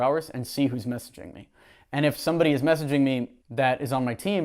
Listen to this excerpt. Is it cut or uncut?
cut